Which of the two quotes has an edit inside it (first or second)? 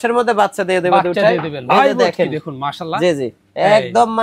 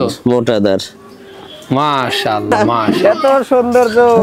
second